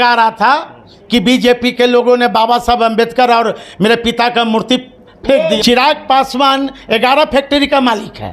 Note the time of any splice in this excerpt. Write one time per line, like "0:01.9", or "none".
0:05.6